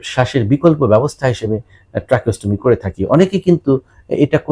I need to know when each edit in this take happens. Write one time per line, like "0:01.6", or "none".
none